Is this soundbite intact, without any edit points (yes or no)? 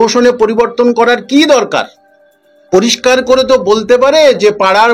yes